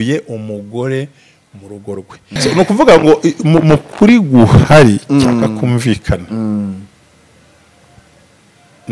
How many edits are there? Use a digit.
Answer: 1